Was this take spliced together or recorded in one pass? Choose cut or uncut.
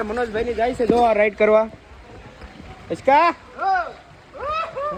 uncut